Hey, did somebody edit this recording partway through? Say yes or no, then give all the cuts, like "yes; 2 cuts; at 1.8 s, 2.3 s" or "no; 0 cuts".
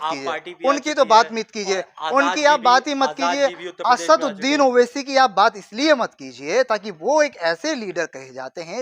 no; 0 cuts